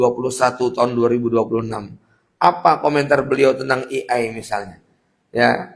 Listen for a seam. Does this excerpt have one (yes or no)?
no